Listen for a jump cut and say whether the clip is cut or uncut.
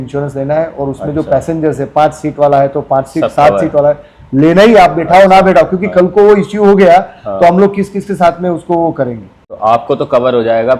uncut